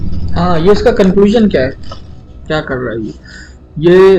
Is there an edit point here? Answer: no; 0 cuts

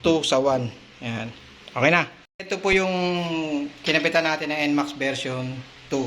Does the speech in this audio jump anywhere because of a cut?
yes; 1 cut; at 2.4 s

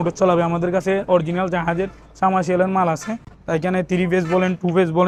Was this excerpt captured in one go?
yes; 0 cuts

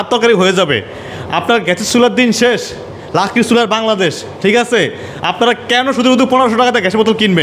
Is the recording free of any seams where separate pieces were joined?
yes; 0 cuts

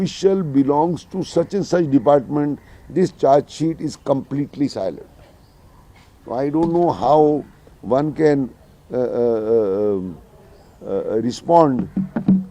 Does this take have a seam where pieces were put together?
no; 0 cuts

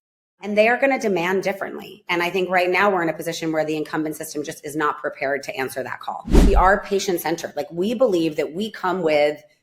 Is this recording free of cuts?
no; 1 cut; at 6.5 s

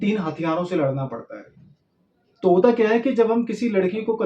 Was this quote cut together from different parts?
no; 0 cuts

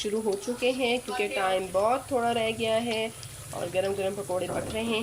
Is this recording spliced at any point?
no; 0 cuts

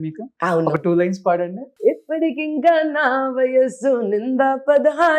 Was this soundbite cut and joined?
yes; 1 cut; at 1.6 s

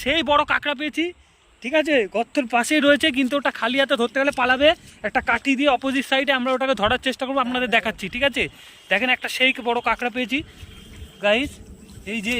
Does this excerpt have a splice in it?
no; 0 cuts

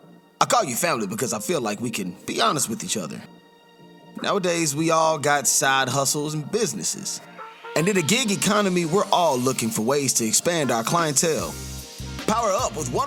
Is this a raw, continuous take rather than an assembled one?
yes; 0 cuts

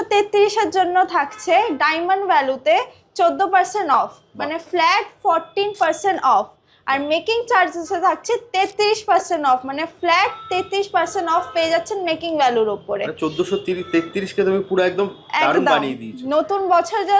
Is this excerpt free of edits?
yes; 0 cuts

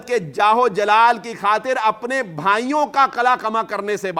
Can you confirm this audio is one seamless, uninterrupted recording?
yes; 0 cuts

